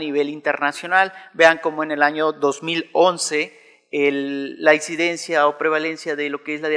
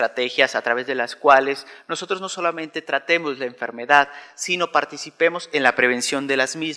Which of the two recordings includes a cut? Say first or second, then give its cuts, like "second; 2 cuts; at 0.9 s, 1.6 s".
first; 1 cut; at 3.4 s